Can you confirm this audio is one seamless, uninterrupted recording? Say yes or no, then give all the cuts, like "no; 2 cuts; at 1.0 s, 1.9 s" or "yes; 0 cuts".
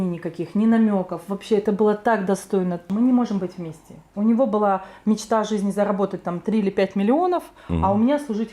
no; 1 cut; at 2.8 s